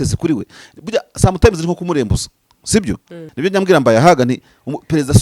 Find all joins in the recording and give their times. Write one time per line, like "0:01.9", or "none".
0:03.2